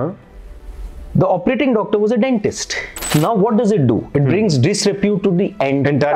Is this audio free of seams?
no; 1 cut; at 3.0 s

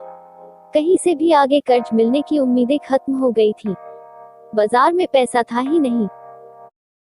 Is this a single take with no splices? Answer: no; 1 cut; at 6.1 s

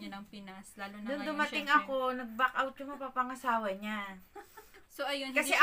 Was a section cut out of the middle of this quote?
no; 0 cuts

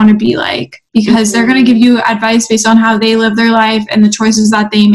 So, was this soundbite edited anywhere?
no; 0 cuts

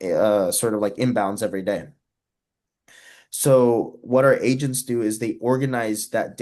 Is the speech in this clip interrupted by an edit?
no; 0 cuts

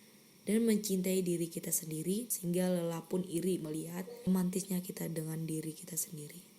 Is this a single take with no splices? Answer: no; 2 cuts; at 2.3 s, 4.3 s

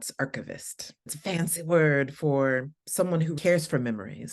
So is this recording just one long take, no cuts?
no; 2 cuts; at 1.1 s, 3.4 s

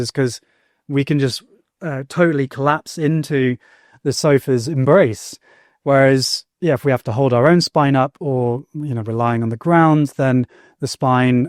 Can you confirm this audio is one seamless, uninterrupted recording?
yes; 0 cuts

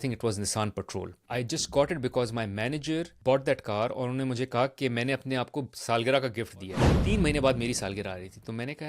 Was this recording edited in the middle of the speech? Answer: yes; 3 cuts; at 1.2 s, 3.1 s, 6.9 s

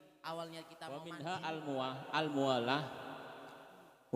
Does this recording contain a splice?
yes; 1 cut; at 1.0 s

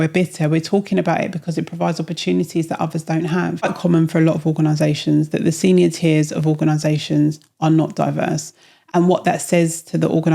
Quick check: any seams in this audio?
yes; 1 cut; at 3.7 s

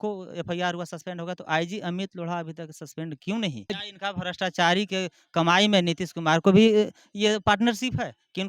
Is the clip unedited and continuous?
no; 1 cut; at 3.7 s

